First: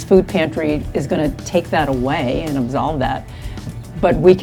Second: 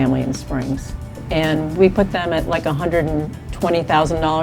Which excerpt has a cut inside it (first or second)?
second